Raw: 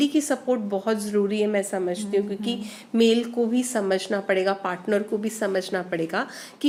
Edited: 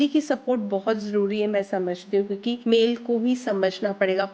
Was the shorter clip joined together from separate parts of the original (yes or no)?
yes